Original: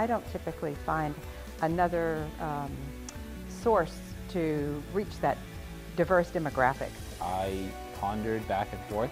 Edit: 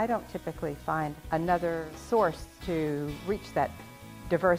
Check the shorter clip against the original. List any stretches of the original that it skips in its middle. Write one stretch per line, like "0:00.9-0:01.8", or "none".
0:01.2-0:01.5
0:02.2-0:03.5
0:04.0-0:04.2

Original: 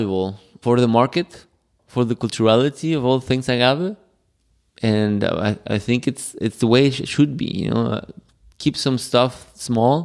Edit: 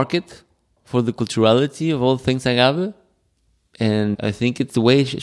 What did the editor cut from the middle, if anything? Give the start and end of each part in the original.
0:05.2-0:06.1

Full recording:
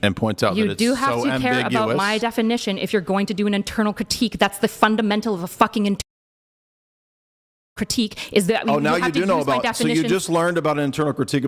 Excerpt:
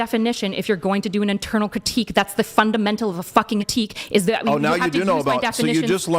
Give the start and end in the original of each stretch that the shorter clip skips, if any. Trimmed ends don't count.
0:05.9-0:07.8

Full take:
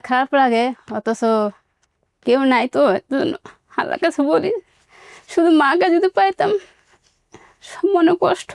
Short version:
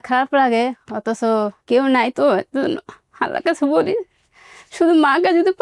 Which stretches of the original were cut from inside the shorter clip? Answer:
0:01.6-0:02.1

